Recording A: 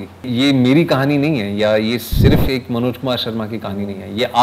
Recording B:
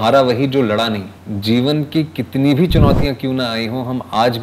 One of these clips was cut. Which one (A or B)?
B